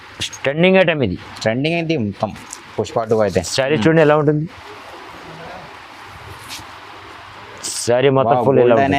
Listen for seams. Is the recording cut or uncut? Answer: uncut